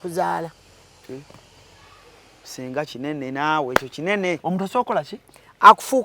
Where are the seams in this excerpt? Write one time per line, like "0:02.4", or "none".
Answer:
0:04.4